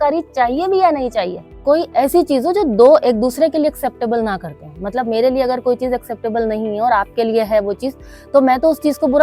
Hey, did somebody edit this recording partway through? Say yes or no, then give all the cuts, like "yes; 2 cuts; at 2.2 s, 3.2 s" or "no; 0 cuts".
yes; 1 cut; at 1.4 s